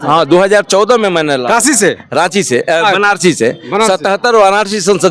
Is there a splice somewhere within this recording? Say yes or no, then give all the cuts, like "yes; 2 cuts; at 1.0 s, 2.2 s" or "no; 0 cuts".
no; 0 cuts